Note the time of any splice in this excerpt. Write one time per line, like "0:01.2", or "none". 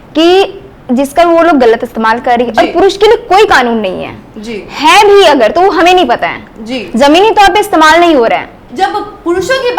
0:08.6